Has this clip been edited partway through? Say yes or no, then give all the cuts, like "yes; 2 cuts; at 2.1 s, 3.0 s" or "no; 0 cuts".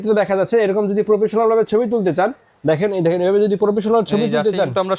no; 0 cuts